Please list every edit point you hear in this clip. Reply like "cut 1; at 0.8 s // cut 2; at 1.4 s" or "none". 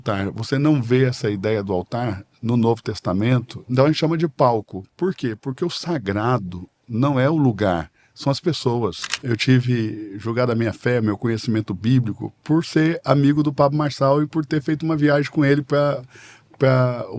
cut 1; at 3.6 s // cut 2; at 9.1 s